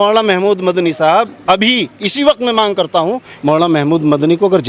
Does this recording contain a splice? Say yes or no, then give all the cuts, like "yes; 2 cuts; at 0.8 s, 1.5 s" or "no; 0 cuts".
yes; 1 cut; at 3.3 s